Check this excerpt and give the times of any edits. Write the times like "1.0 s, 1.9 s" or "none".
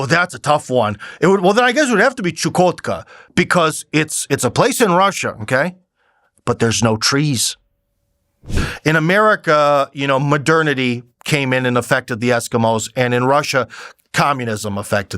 8.6 s